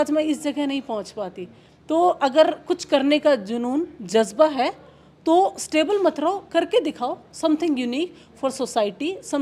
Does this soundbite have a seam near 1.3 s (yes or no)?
no